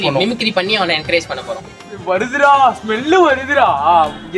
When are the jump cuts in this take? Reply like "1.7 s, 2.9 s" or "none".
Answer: 2.0 s